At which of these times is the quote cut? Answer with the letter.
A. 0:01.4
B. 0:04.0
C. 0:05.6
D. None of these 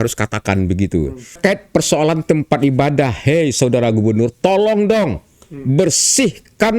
A